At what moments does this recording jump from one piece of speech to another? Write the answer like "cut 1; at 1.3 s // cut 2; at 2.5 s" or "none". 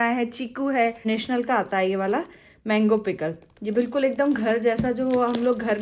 cut 1; at 1.0 s